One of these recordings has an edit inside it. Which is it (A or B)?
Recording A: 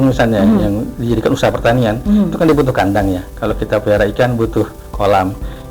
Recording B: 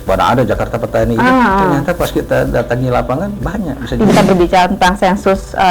B